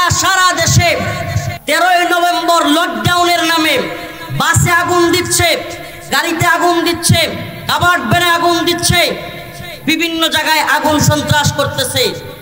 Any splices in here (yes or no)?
yes